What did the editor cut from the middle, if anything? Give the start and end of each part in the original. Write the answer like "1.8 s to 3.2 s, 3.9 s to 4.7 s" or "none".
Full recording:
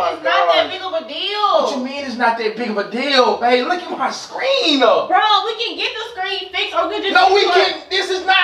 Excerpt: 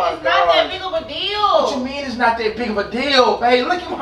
none